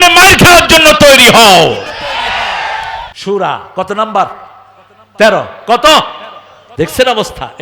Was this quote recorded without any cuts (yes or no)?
no